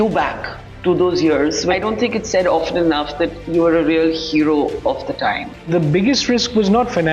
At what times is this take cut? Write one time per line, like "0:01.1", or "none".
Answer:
0:01.7
0:05.7